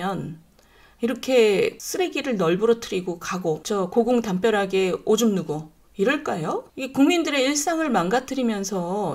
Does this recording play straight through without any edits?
no; 3 cuts; at 1.8 s, 3.6 s, 6.7 s

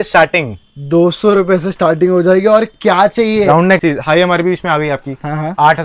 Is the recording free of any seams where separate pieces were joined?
no; 1 cut; at 3.8 s

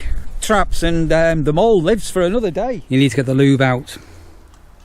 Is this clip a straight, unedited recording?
no; 1 cut; at 2.7 s

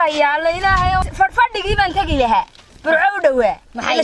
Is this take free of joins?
no; 1 cut; at 1.1 s

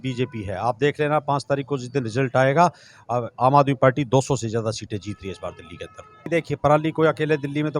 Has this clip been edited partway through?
yes; 1 cut; at 6.3 s

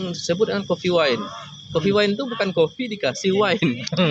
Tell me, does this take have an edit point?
no; 0 cuts

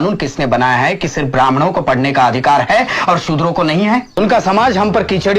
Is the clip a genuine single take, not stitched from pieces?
no; 1 cut; at 4.2 s

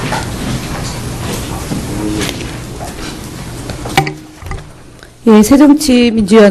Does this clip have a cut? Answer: no; 0 cuts

